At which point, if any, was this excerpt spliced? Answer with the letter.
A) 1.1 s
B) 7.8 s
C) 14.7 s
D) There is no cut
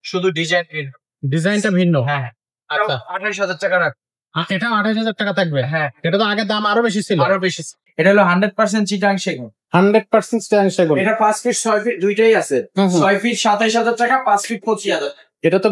B